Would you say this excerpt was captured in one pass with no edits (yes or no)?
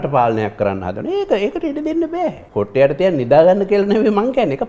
no